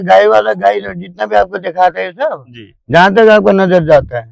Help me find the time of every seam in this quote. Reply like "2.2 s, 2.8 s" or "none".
none